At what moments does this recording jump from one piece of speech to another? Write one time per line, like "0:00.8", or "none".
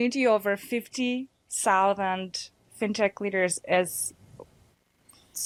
none